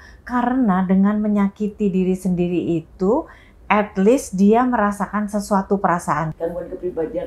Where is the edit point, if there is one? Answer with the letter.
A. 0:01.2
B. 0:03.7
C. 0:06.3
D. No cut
C